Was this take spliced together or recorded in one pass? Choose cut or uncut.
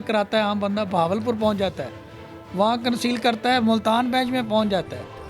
uncut